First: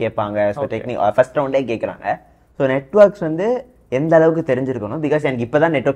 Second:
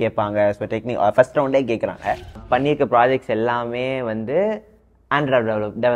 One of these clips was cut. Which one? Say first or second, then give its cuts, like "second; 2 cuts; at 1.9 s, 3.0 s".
second; 1 cut; at 2.4 s